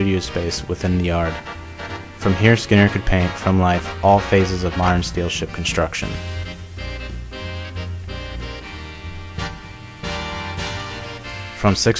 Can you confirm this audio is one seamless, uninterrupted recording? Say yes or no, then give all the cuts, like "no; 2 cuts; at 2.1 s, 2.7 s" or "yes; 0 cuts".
no; 1 cut; at 8.7 s